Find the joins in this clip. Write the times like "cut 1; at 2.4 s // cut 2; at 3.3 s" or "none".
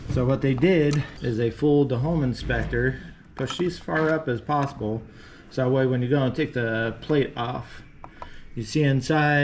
none

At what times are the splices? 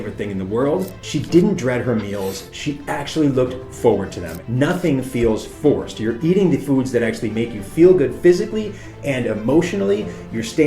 cut 1; at 1.0 s // cut 2; at 4.3 s

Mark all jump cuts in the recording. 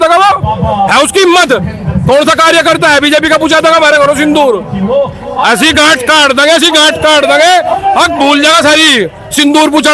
none

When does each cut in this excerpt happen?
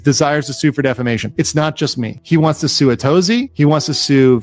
cut 1; at 1.3 s

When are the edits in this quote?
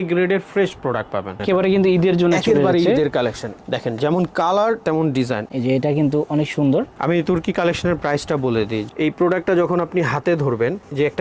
cut 1; at 1.4 s // cut 2; at 5.5 s // cut 3; at 8.9 s

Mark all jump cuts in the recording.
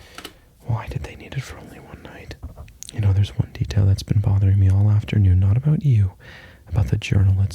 cut 1; at 2.7 s

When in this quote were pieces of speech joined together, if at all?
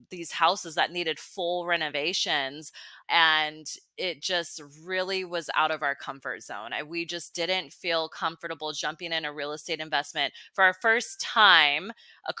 none

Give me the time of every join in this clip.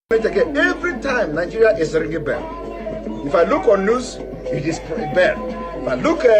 cut 1; at 0.9 s

